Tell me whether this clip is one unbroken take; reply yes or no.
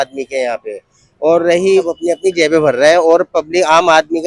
no